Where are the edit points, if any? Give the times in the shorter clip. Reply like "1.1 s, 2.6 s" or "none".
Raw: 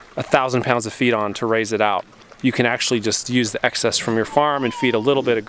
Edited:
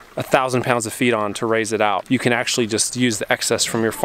2.0 s